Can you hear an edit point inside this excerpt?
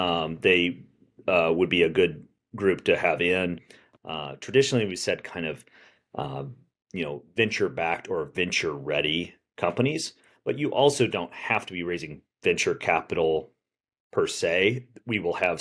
yes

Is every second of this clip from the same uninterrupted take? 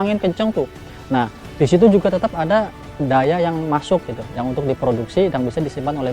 no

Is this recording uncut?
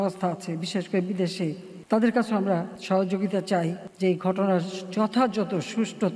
no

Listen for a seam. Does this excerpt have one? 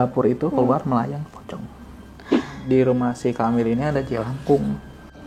yes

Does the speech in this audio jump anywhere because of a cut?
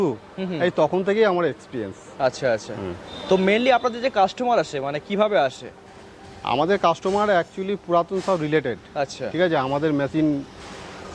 no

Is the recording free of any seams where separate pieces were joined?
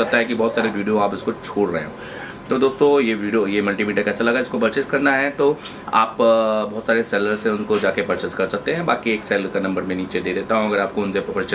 yes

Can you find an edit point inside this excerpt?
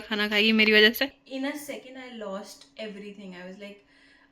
yes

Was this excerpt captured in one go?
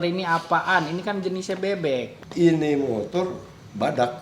no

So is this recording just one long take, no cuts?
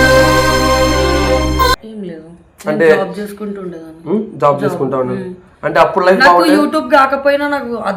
yes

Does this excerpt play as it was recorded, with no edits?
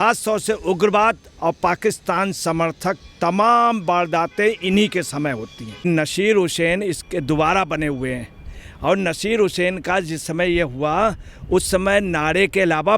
no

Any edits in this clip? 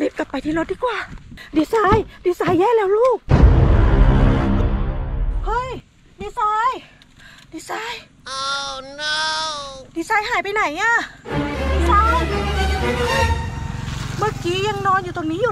yes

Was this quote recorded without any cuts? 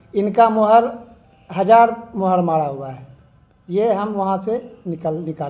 yes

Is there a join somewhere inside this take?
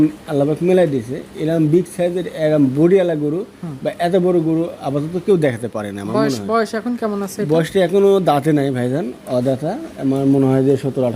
no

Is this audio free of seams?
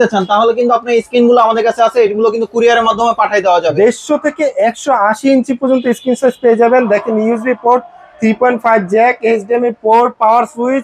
no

